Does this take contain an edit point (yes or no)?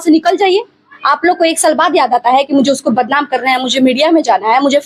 no